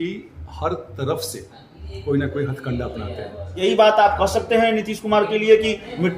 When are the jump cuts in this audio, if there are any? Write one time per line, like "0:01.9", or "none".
0:03.6